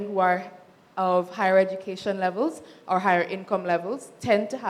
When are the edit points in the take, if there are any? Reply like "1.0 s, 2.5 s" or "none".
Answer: none